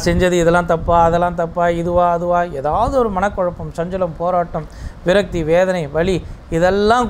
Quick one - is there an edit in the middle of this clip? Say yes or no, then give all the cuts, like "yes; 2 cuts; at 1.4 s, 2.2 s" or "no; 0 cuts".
no; 0 cuts